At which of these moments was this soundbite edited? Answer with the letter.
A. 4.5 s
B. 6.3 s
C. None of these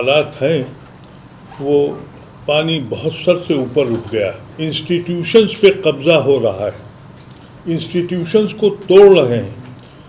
A